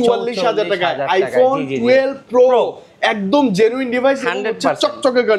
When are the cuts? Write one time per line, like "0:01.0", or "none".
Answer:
none